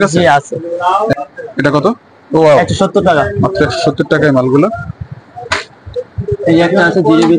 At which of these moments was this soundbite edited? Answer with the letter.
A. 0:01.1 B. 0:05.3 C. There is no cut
A